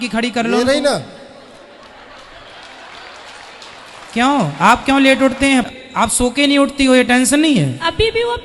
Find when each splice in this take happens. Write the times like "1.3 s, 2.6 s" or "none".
5.7 s